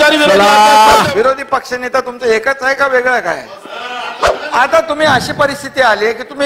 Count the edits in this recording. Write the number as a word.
two